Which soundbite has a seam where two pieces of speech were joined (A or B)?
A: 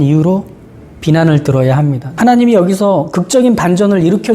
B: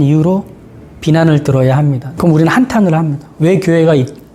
A